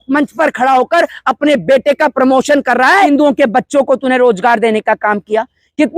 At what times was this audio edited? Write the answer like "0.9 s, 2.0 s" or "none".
3.1 s